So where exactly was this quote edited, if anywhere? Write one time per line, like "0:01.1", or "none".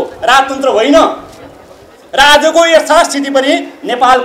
none

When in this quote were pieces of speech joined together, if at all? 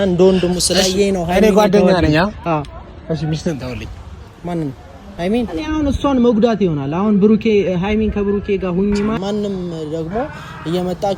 0:05.5
0:09.2

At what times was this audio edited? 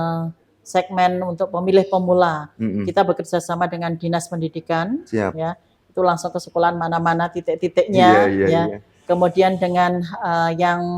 none

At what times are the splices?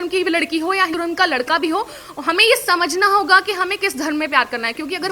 0:00.9

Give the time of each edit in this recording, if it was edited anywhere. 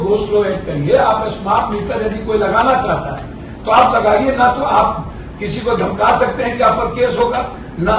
none

